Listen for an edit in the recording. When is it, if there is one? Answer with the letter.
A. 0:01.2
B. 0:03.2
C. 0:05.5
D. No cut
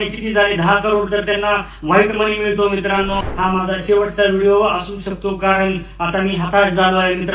B